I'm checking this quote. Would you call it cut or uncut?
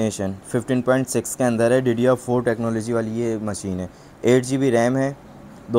uncut